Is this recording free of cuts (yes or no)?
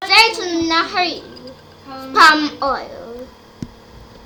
yes